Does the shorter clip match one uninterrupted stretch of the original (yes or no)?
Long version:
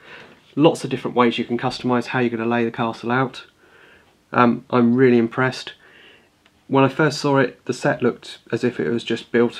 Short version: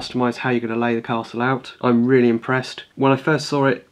no